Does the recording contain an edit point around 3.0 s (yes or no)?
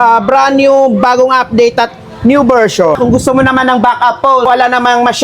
yes